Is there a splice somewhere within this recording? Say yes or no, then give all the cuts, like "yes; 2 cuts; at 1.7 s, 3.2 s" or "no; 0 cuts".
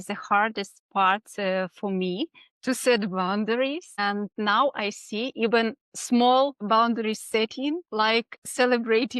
yes; 4 cuts; at 4.2 s, 5.9 s, 6.6 s, 7.8 s